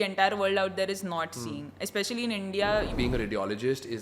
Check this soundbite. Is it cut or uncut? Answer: cut